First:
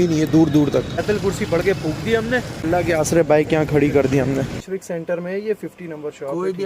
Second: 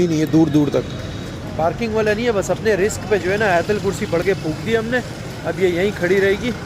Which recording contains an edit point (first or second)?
first